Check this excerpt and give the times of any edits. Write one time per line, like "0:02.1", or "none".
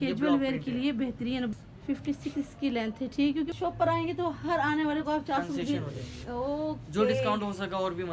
0:01.5
0:03.5